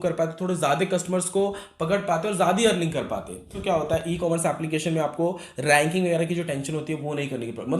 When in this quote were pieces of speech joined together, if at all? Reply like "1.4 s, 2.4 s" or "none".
3.6 s